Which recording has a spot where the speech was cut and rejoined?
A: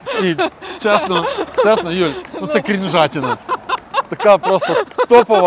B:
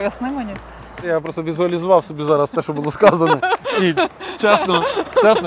B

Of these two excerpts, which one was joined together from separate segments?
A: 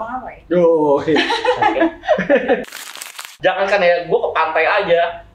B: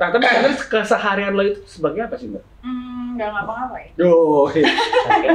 A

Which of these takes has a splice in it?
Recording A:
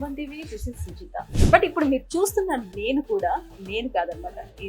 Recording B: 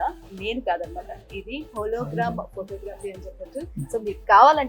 A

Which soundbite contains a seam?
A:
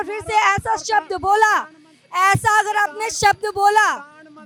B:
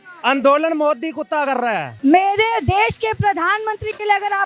B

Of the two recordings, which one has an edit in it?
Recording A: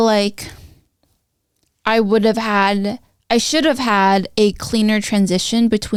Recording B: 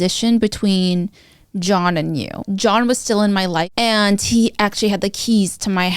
B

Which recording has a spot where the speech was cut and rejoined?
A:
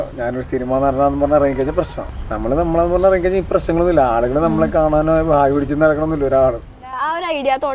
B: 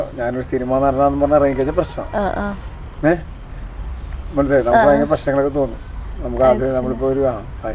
A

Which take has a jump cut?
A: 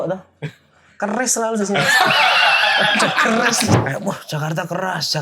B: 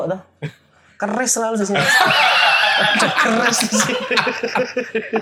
A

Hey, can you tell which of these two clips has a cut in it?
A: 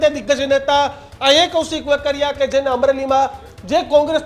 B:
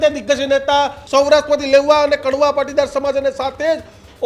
B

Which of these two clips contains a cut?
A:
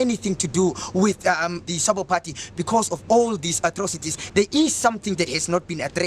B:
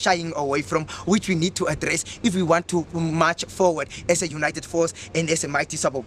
A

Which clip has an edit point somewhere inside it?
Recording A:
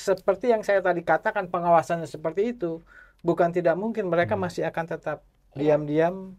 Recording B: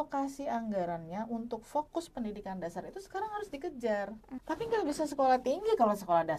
B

